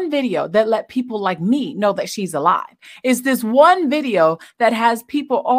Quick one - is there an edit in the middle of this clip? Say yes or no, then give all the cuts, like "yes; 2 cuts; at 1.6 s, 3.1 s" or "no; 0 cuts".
no; 0 cuts